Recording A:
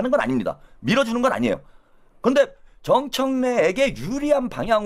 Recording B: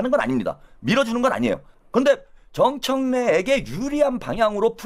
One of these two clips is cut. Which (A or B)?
B